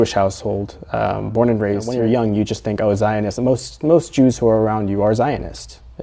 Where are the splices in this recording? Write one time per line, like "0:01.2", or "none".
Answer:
0:01.9